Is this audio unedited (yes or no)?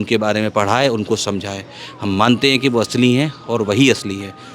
yes